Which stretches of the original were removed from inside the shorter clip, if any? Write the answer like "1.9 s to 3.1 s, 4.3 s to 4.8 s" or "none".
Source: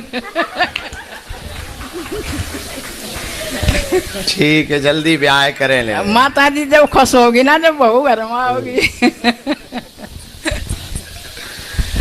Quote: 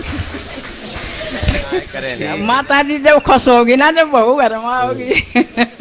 4.3 s to 5.8 s